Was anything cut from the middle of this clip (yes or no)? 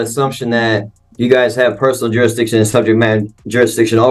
no